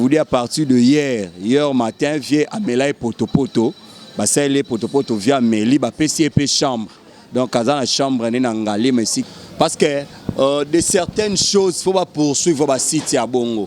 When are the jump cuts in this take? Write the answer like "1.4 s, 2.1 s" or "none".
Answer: 9.2 s